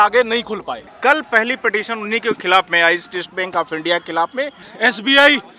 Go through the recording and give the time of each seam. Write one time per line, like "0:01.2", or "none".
0:00.9
0:04.6